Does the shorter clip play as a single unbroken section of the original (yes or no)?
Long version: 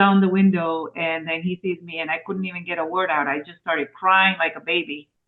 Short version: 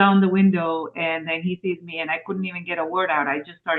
yes